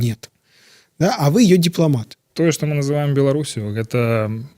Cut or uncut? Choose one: cut